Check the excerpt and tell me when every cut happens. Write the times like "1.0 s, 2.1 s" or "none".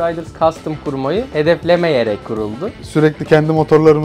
2.7 s

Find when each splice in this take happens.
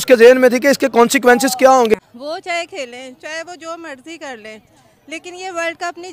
1.9 s

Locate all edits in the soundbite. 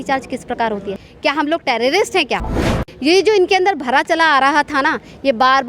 1.0 s, 2.7 s

